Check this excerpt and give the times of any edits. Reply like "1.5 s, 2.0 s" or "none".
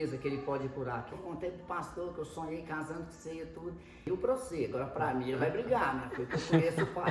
1.2 s, 4.0 s